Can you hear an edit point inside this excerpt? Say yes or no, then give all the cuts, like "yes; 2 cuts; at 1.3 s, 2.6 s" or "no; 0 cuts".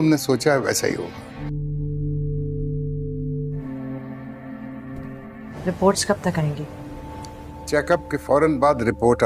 yes; 3 cuts; at 1.4 s, 3.6 s, 5.5 s